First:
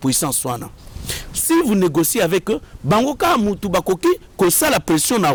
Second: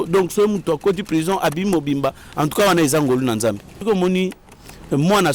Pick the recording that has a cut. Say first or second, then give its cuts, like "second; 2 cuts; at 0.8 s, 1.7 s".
second; 1 cut; at 3.8 s